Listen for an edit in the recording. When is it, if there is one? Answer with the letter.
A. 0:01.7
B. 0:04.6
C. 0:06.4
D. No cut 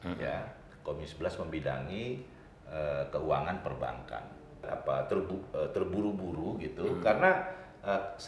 B